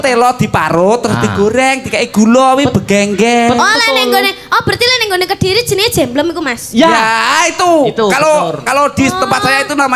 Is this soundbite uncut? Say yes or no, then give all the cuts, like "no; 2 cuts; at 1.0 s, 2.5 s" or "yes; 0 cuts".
yes; 0 cuts